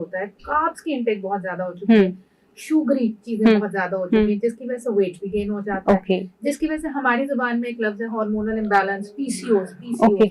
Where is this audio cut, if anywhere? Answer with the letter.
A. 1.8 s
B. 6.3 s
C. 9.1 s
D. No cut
D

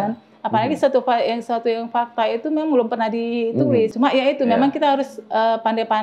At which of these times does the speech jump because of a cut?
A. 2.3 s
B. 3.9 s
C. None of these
B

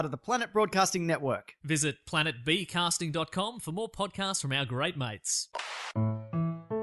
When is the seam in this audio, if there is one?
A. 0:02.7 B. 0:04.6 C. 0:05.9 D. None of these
C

